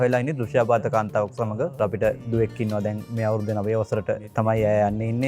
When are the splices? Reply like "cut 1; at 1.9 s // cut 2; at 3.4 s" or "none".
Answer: cut 1; at 2.1 s // cut 2; at 3.1 s // cut 3; at 4.3 s

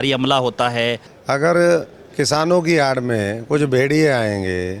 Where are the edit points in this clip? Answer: cut 1; at 1.1 s

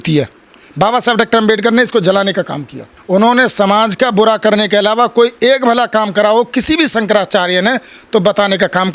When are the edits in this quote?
cut 1; at 2.9 s

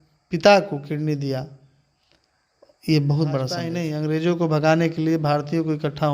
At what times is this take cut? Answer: cut 1; at 3.8 s

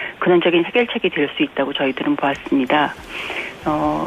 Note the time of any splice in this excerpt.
cut 1; at 1.1 s

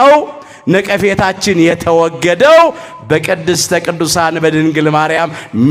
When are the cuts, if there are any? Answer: none

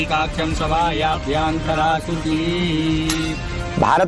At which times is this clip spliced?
cut 1; at 1.0 s

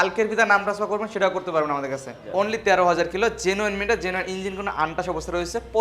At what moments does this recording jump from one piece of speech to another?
cut 1; at 2.2 s

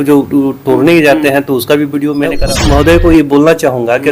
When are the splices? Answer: cut 1; at 2.4 s

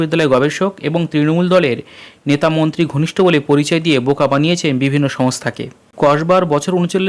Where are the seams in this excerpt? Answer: cut 1; at 5.8 s

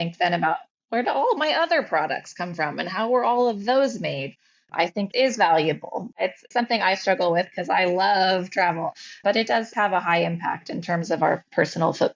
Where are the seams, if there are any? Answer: cut 1; at 6.2 s // cut 2; at 8.9 s

